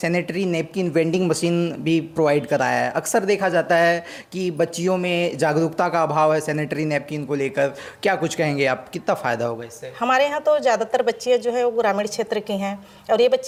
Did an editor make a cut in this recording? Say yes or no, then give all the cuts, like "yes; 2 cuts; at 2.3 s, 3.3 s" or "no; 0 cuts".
no; 0 cuts